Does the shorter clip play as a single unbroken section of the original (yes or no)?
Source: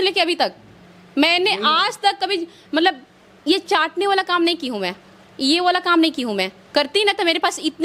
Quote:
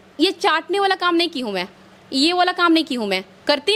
yes